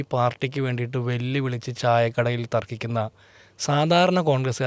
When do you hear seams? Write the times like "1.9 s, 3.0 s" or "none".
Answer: none